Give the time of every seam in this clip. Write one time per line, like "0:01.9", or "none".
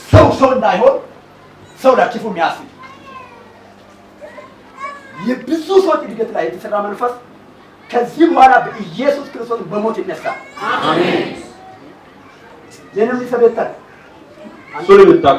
none